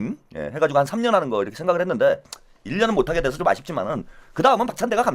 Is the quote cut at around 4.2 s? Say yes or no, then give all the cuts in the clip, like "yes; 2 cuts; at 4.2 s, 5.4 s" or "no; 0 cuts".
no; 0 cuts